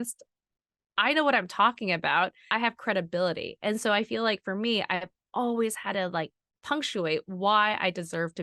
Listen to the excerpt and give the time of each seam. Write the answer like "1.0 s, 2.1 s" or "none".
2.5 s